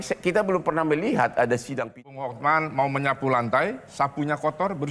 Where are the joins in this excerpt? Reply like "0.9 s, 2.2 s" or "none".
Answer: 1.9 s

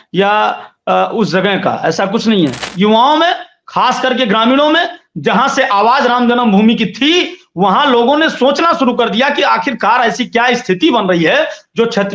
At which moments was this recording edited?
2.7 s

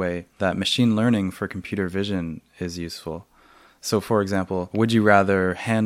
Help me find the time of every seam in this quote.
none

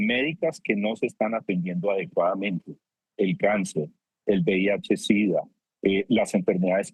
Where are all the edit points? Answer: none

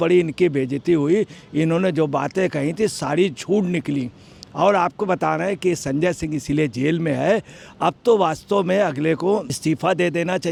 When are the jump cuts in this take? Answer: none

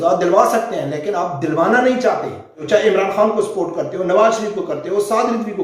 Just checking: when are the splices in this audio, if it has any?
2.6 s

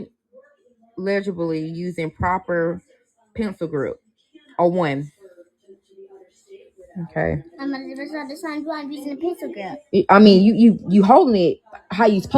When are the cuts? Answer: 9.2 s, 11.1 s

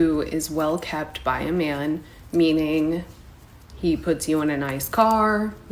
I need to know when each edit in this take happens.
none

